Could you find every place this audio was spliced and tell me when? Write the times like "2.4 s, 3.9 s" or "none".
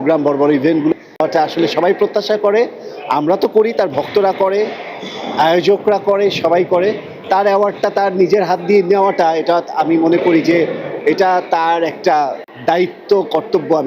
0.9 s, 12.5 s